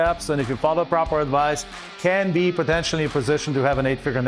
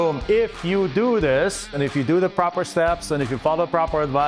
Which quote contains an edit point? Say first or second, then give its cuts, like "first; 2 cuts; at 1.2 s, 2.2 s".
second; 1 cut; at 1.7 s